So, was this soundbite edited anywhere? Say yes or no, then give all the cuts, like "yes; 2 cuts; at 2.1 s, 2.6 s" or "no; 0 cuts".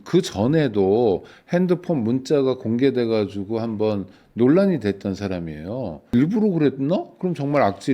yes; 1 cut; at 6.1 s